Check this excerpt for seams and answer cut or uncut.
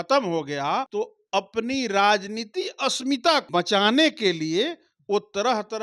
cut